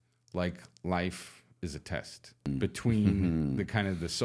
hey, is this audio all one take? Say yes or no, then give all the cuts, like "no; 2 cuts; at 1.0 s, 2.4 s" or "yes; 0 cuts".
no; 1 cut; at 2.5 s